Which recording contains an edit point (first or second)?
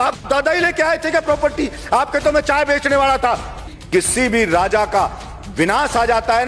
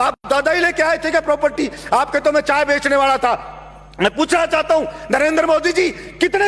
first